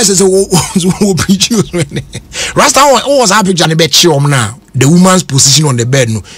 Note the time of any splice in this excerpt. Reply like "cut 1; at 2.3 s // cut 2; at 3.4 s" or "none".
cut 1; at 3.7 s